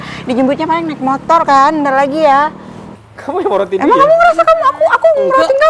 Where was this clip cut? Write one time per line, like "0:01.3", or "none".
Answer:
0:02.8